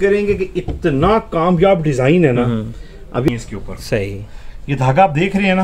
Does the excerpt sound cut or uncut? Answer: cut